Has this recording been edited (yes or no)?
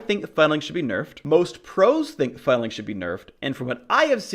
yes